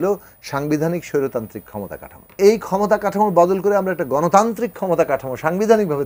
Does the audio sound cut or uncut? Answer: cut